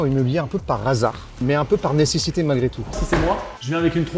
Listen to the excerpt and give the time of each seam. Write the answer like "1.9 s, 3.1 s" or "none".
1.4 s, 2.9 s